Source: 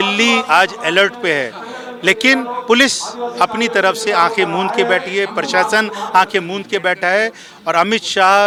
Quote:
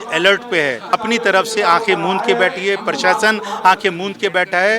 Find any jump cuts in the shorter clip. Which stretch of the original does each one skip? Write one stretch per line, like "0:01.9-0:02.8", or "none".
0:01.6-0:03.4